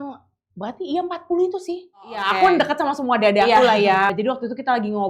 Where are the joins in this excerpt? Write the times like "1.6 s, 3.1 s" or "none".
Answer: 2.3 s, 4.1 s